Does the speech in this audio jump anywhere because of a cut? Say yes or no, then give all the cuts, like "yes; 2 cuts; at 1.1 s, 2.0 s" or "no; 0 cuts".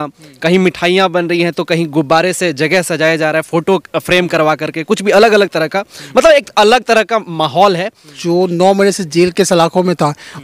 yes; 1 cut; at 8.1 s